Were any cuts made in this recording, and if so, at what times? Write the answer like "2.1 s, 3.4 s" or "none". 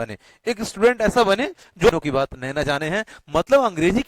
1.9 s